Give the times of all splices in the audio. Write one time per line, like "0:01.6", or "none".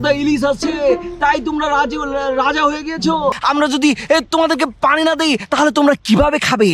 0:03.4

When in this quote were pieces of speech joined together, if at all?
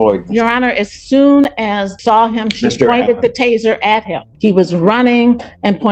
0:01.9
0:04.3

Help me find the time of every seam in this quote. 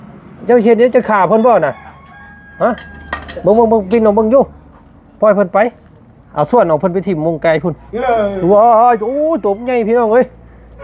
none

